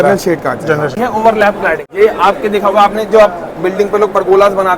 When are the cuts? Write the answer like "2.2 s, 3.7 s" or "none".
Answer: 1.0 s, 1.9 s